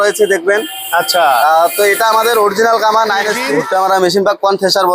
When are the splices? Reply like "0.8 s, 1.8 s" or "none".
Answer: 3.5 s